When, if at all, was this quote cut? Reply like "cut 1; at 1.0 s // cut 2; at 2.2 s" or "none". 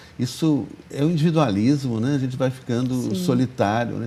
none